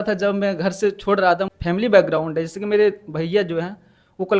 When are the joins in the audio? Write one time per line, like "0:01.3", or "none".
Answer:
0:01.5